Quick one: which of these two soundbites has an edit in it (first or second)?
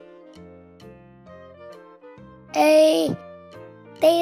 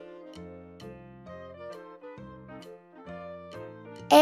first